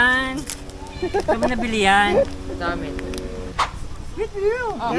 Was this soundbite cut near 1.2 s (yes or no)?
no